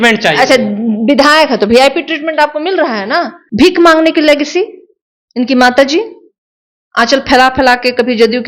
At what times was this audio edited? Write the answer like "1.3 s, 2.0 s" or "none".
3.4 s